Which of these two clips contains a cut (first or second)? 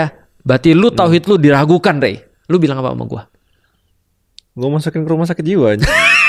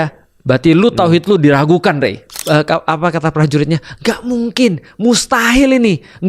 second